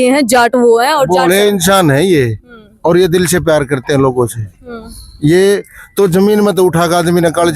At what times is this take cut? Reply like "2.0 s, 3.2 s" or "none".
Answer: none

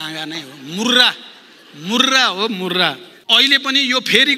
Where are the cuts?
3.1 s

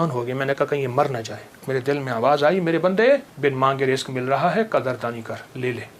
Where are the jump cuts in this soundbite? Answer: 1.6 s, 3.3 s

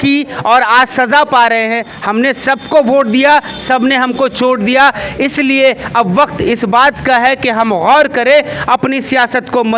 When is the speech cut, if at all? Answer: 1.9 s

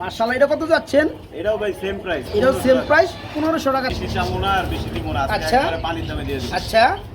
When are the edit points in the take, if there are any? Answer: 3.9 s

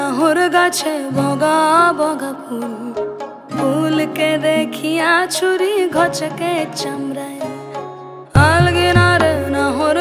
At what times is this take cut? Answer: none

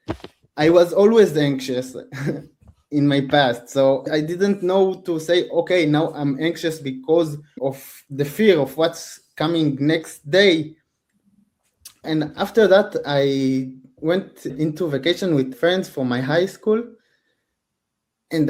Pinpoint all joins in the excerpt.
4.1 s, 7.5 s, 12.1 s, 14.5 s, 15.5 s

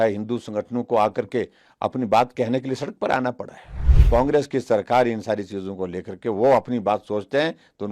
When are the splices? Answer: 4.0 s

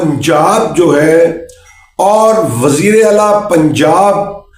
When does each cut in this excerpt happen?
none

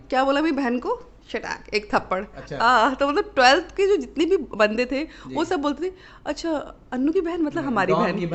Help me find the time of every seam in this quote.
none

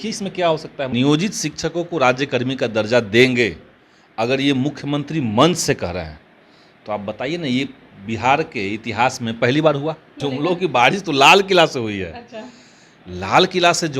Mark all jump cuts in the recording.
0.9 s, 10.1 s

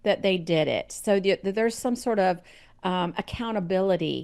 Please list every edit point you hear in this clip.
none

